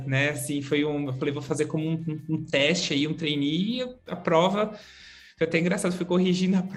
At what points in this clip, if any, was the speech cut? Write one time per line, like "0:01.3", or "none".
none